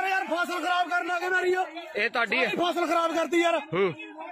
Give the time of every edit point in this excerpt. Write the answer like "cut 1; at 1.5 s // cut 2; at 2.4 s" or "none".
none